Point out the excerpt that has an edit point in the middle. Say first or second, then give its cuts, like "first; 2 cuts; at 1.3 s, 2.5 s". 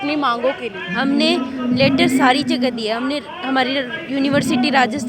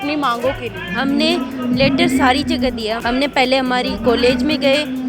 second; 1 cut; at 3.0 s